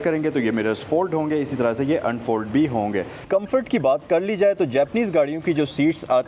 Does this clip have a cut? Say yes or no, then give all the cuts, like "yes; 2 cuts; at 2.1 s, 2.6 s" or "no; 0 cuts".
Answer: yes; 1 cut; at 3.2 s